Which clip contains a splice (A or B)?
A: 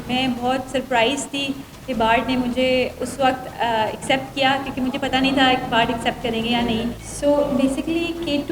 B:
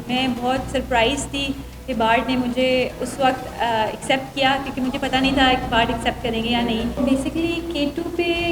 B